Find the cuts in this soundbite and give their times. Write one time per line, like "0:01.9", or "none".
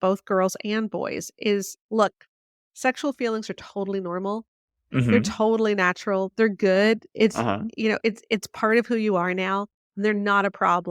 0:01.7